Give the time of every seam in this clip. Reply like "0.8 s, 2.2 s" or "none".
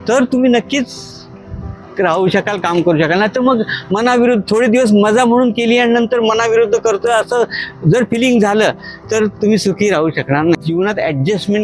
10.6 s

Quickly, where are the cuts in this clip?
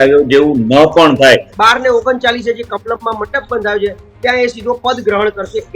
1.5 s

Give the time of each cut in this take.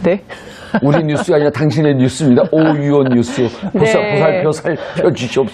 2.6 s

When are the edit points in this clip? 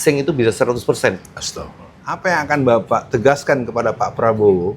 2.0 s

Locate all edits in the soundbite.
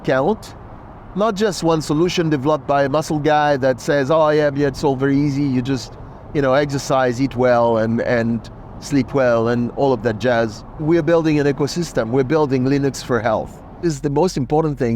10.8 s, 13.8 s

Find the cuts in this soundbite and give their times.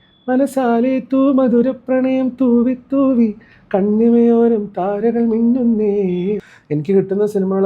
6.4 s

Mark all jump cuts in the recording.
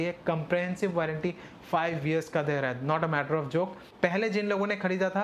3.8 s

